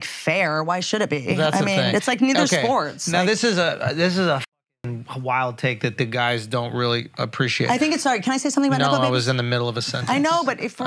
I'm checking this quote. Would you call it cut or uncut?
uncut